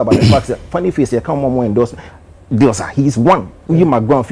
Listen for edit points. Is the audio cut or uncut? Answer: uncut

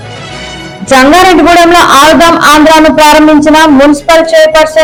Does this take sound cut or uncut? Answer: uncut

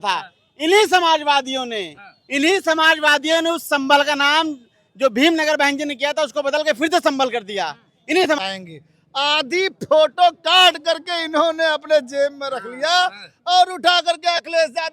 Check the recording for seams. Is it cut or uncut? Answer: cut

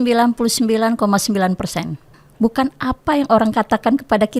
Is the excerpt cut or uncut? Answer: cut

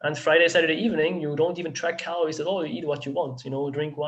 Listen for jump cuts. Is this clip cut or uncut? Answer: uncut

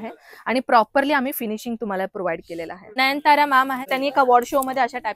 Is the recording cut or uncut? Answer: cut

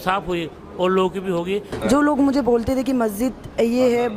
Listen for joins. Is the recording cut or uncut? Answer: cut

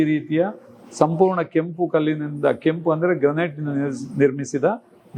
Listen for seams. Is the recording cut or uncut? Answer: uncut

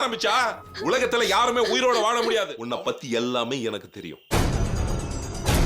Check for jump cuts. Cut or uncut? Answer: cut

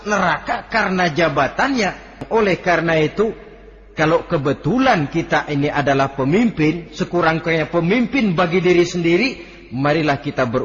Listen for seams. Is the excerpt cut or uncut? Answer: cut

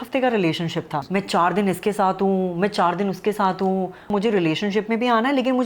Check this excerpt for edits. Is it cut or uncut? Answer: cut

